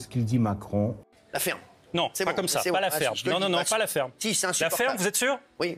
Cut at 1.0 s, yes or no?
yes